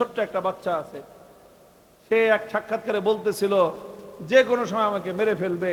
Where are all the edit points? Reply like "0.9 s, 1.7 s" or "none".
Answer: none

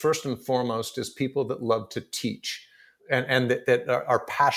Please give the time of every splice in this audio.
2.9 s

